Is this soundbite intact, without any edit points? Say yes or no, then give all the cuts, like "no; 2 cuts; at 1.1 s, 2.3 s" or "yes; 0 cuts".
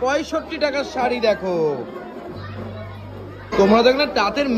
no; 1 cut; at 3.5 s